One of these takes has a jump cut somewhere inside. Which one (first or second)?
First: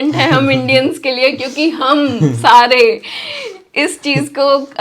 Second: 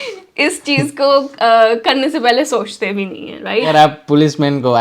second